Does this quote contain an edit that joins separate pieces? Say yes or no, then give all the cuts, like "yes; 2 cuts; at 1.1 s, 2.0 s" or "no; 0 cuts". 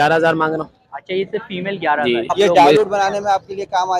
yes; 1 cut; at 2.3 s